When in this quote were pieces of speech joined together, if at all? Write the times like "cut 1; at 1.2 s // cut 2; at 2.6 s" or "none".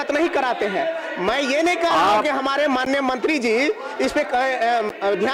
none